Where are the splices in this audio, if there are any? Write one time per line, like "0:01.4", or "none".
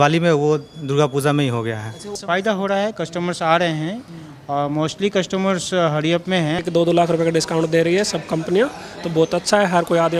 0:02.2
0:06.6